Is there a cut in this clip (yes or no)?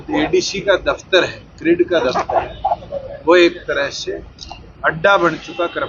no